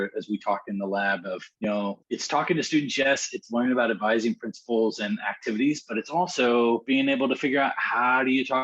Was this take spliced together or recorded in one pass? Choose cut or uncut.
cut